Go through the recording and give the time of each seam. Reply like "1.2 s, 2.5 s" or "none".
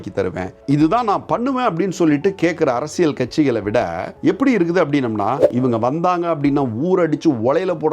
5.5 s